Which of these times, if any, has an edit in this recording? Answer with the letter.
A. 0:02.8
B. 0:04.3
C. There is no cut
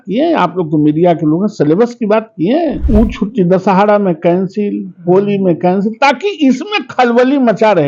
A